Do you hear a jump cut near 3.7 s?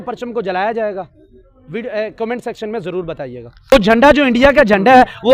yes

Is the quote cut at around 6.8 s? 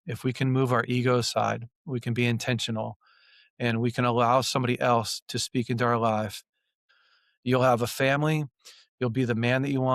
yes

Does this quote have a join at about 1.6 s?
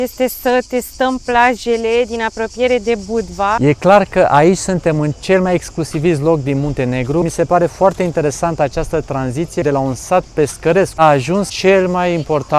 no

